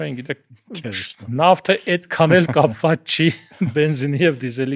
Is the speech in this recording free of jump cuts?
yes; 0 cuts

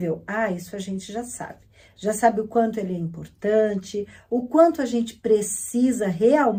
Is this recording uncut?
yes; 0 cuts

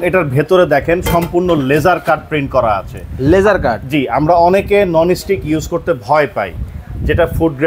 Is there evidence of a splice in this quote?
no; 0 cuts

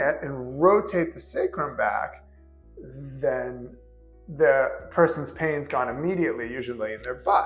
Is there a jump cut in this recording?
no; 0 cuts

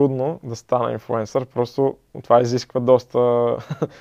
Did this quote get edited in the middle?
no; 0 cuts

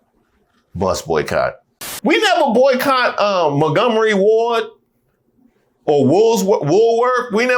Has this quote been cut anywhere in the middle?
yes; 1 cut; at 1.9 s

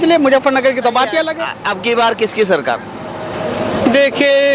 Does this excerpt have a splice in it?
yes; 1 cut; at 1.5 s

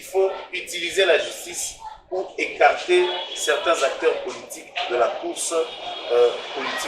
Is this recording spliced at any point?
no; 0 cuts

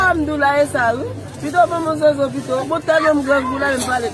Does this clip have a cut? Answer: no; 0 cuts

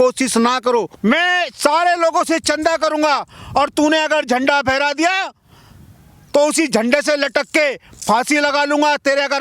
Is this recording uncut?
no; 1 cut; at 0.9 s

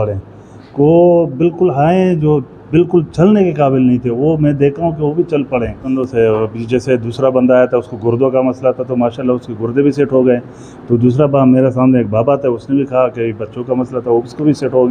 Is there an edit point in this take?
yes; 1 cut; at 5.9 s

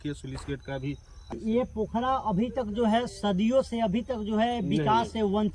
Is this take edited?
yes; 1 cut; at 1.4 s

